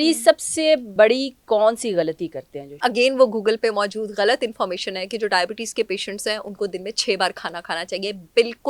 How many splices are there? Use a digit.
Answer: 2